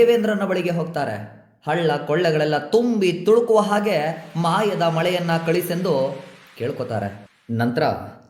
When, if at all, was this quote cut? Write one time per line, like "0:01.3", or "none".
none